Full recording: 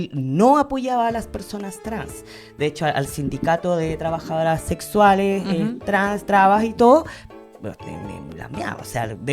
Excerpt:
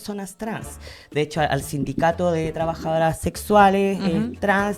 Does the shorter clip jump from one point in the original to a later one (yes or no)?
no